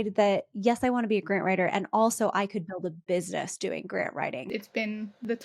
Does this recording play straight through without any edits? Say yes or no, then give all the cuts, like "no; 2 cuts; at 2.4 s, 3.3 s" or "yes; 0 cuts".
no; 1 cut; at 4.5 s